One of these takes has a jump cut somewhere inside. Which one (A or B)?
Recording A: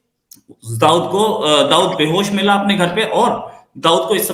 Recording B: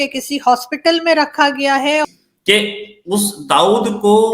B